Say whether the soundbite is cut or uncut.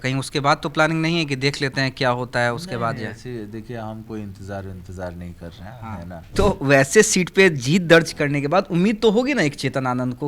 cut